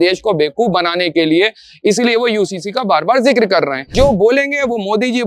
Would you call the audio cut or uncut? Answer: cut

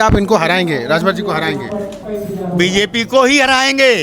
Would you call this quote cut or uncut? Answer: cut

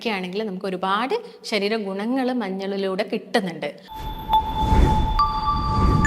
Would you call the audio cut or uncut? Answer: cut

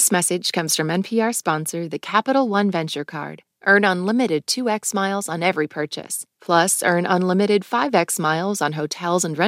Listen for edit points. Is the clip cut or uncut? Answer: uncut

